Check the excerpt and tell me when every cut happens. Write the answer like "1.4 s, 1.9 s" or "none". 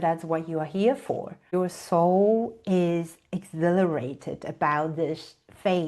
1.4 s